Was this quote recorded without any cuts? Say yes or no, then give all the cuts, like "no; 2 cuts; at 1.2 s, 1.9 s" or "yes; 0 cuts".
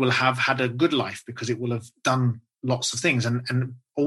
yes; 0 cuts